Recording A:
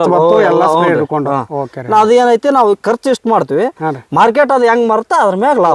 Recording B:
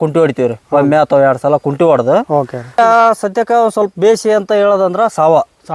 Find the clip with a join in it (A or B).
B